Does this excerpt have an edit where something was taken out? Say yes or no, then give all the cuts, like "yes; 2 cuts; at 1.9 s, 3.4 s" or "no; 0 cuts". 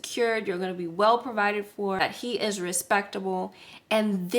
yes; 1 cut; at 2.0 s